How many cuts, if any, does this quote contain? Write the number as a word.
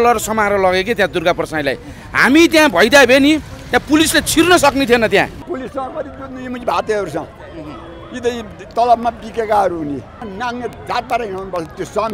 two